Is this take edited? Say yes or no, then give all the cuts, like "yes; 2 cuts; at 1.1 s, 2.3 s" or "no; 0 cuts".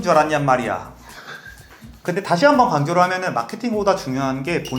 yes; 1 cut; at 1.9 s